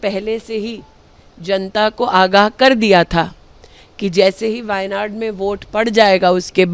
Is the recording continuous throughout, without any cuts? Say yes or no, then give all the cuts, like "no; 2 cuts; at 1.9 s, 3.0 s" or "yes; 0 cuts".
yes; 0 cuts